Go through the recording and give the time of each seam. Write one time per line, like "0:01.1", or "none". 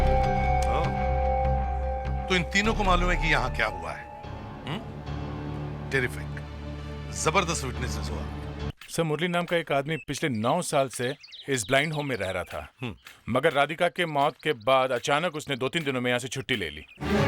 0:08.7